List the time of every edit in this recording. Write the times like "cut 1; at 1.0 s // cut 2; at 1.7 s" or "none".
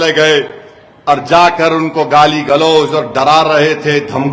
none

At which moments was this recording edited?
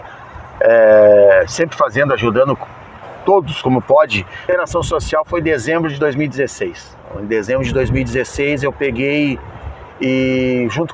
cut 1; at 4.5 s

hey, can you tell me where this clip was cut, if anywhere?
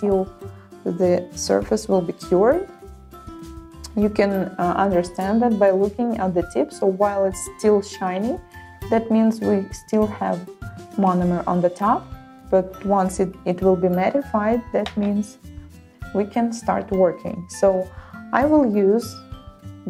none

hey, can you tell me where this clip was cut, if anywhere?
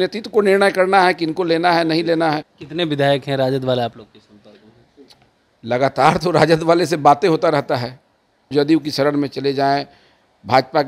cut 1; at 2.6 s // cut 2; at 8.5 s

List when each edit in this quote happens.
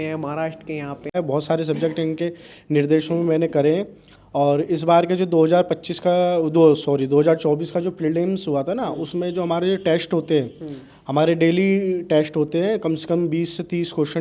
cut 1; at 1.1 s

